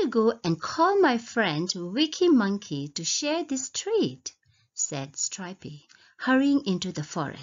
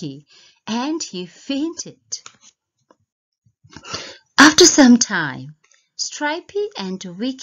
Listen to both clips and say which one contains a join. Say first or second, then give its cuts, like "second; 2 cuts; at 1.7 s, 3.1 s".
first; 1 cut; at 1.3 s